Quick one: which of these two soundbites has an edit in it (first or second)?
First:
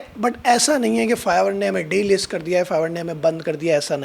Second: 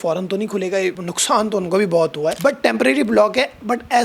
second